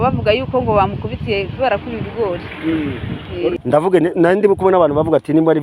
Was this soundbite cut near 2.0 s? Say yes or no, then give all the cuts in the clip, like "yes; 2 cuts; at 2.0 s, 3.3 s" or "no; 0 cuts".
no; 1 cut; at 3.5 s